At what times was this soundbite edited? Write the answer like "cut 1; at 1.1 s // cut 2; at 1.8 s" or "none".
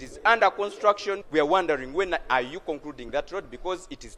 cut 1; at 1.2 s